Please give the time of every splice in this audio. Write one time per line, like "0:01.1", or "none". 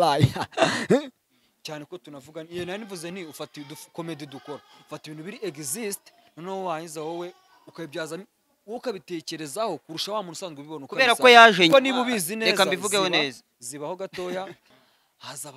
0:01.2
0:14.7

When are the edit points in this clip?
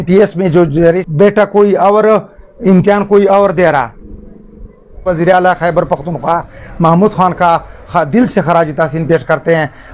0:01.0
0:05.1

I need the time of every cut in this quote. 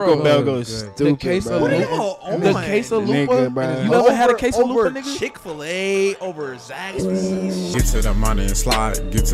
0:07.7

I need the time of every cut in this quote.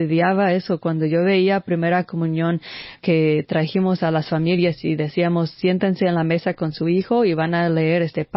0:03.0

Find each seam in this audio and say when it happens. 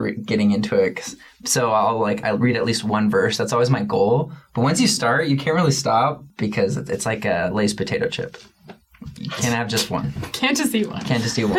0:06.2
0:08.7

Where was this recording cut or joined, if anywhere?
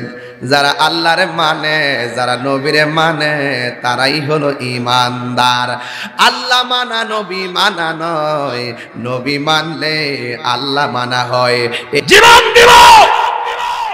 0:12.0

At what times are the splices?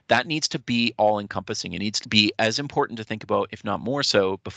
0:02.0

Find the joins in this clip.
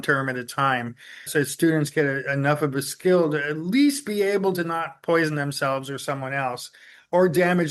none

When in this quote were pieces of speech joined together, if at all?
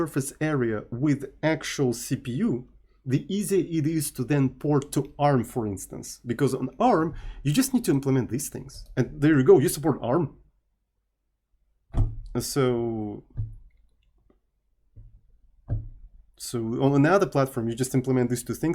none

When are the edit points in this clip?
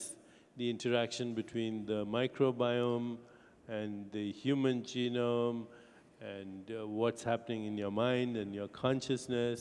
0:02.3

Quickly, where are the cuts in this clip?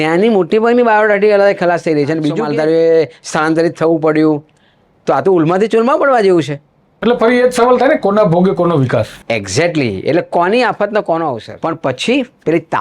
0:02.4
0:11.5

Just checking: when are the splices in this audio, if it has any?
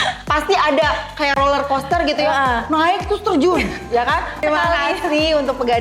0:04.4

